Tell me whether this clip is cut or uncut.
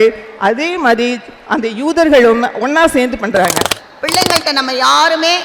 cut